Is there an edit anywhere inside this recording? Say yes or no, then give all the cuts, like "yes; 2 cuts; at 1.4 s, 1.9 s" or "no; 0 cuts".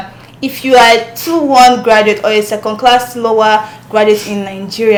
no; 0 cuts